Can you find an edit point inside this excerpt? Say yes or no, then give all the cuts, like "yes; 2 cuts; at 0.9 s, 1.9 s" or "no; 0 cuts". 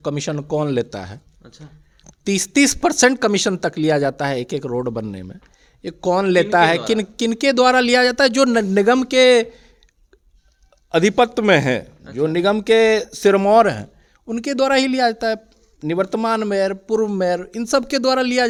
no; 0 cuts